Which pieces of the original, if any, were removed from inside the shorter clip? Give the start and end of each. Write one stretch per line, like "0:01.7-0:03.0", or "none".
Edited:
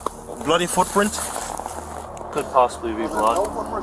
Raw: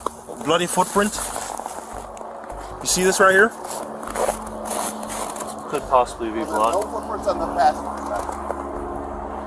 0:02.3-0:05.7